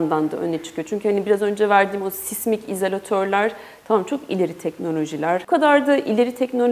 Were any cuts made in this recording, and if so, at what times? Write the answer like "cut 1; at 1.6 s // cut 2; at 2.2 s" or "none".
cut 1; at 5.4 s